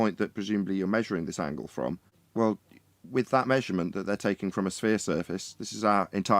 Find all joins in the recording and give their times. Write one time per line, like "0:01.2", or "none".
0:02.2